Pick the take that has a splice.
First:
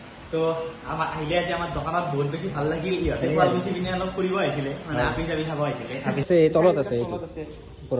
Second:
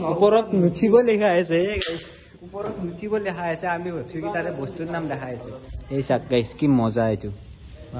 first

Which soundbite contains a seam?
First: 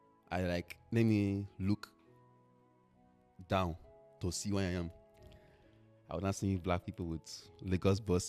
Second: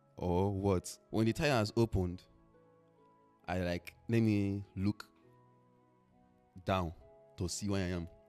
second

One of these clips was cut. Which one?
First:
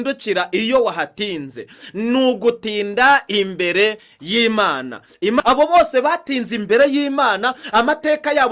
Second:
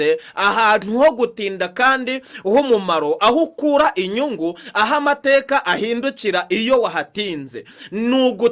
first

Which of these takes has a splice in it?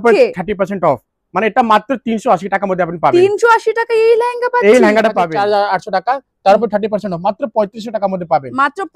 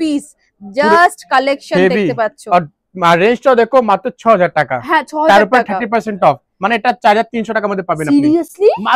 first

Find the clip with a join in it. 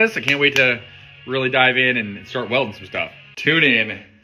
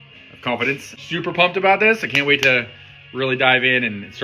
first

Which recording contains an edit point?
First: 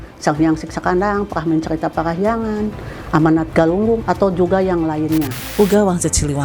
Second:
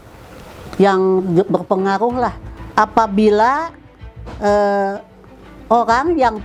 first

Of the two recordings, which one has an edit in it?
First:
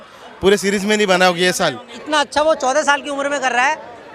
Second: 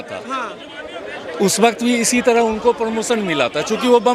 first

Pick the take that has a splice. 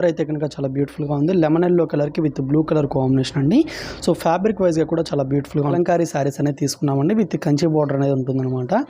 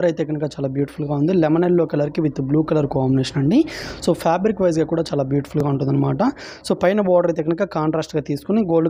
first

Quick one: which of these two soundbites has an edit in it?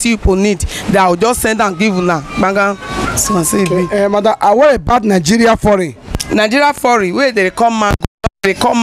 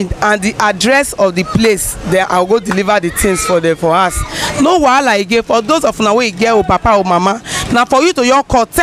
first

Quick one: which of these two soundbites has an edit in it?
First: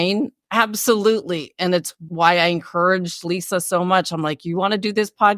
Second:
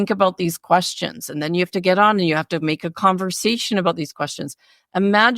first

